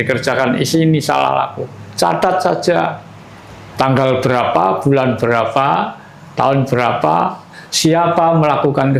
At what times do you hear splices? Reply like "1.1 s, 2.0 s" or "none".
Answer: none